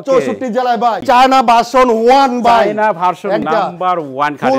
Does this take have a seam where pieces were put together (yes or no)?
yes